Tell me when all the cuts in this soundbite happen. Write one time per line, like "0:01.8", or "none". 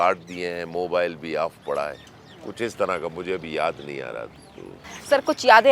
none